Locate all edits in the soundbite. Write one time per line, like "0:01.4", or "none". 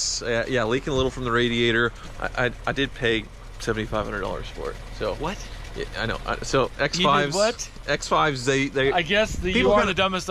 0:02.0

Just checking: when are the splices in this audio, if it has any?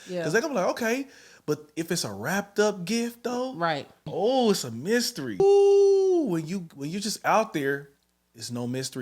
0:04.0
0:05.4

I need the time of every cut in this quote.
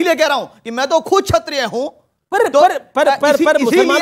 none

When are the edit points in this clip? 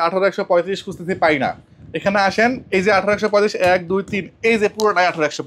none

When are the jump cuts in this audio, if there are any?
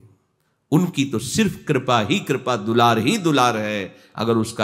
none

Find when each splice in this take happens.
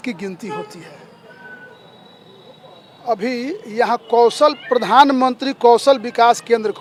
none

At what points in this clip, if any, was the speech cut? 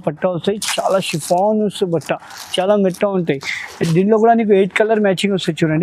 none

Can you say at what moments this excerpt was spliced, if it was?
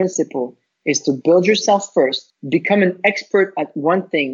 0:02.3

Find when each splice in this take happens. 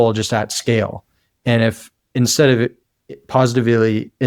none

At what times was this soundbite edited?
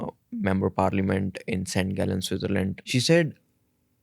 0:02.8

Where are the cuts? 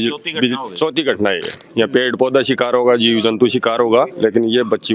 0:01.6
0:04.1

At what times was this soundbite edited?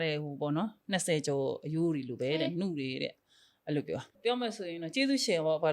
0:04.1

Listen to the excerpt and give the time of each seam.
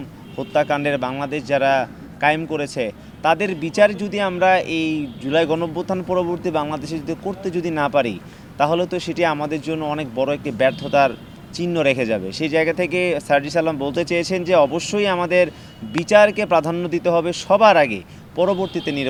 none

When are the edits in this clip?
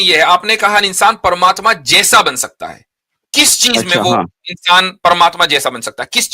none

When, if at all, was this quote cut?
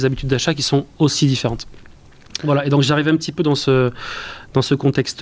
none

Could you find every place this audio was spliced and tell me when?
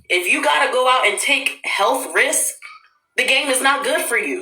0:01.0

